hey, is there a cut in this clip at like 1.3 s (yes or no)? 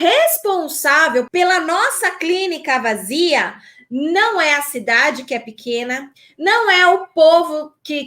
yes